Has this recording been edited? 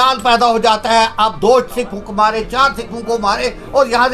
no; 0 cuts

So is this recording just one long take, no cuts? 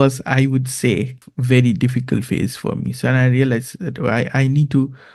no; 1 cut; at 1.2 s

